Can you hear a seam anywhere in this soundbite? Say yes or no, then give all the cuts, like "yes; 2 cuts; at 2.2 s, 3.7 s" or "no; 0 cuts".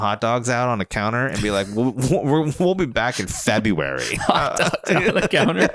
no; 0 cuts